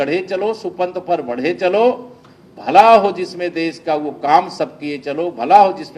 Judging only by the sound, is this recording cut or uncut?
uncut